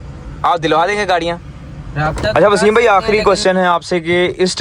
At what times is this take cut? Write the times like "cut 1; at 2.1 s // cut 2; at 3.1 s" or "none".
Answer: cut 1; at 2.3 s